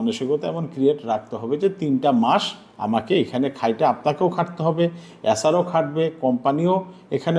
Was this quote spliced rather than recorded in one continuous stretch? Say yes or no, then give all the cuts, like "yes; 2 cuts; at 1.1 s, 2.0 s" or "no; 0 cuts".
no; 0 cuts